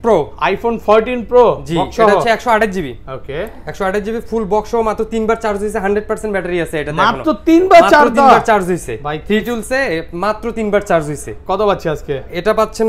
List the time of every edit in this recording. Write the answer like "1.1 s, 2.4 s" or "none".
none

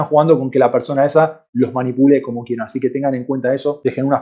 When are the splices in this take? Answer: none

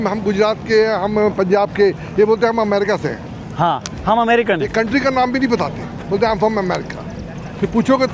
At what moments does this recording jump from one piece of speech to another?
none

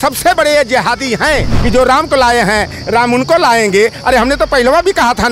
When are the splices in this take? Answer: 1.5 s

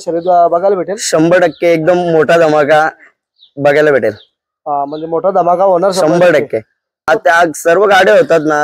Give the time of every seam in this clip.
7.1 s

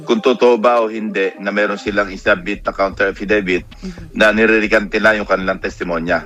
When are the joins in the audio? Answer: none

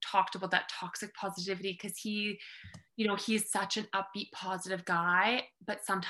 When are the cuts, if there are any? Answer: none

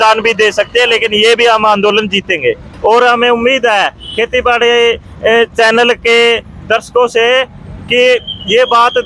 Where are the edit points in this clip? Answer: 2.7 s

